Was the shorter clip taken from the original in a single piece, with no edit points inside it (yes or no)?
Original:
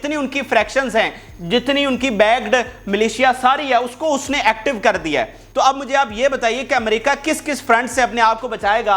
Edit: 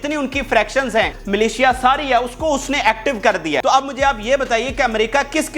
no